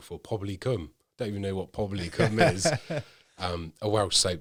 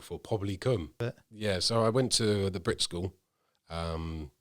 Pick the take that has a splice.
second; 1 cut; at 1.0 s

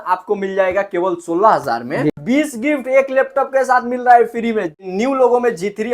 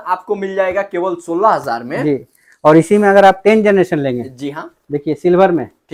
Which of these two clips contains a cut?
first; 2 cuts; at 2.1 s, 4.9 s

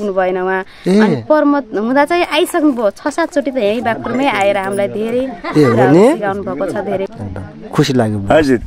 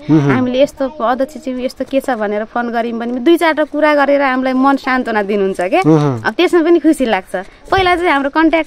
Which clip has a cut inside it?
first; 1 cut; at 7.1 s

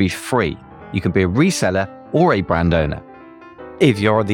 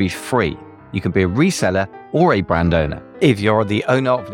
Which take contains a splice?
second; 1 cut; at 3.0 s

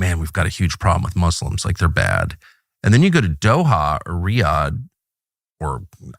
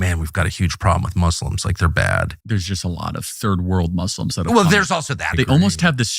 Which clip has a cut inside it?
second; 2 cuts; at 2.4 s, 5.3 s

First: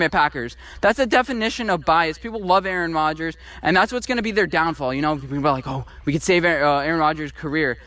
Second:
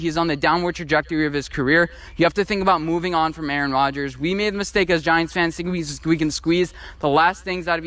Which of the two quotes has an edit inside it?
first; 1 cut; at 5.8 s

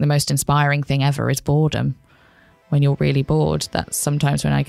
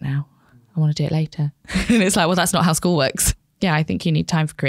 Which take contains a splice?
second; 1 cut; at 3.2 s

